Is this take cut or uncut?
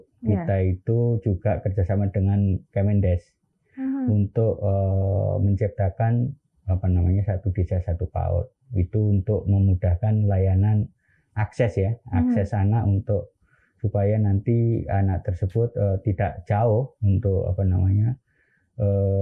uncut